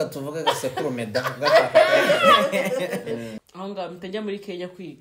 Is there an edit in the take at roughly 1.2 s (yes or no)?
no